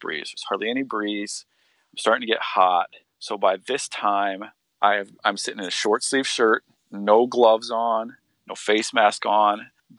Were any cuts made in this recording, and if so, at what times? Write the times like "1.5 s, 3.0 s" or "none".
none